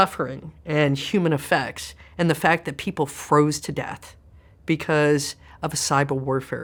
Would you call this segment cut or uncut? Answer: uncut